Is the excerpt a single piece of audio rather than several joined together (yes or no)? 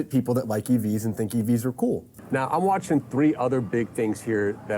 no